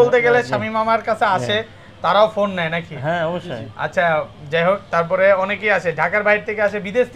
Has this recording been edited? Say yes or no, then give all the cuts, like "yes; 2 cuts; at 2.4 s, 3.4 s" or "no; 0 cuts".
no; 0 cuts